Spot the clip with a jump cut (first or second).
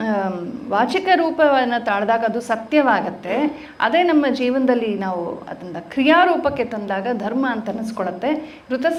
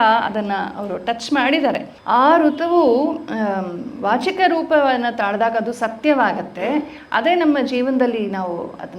second